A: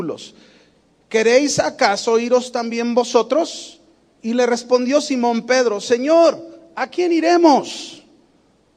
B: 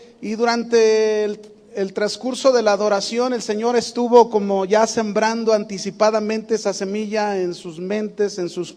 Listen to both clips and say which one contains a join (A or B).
B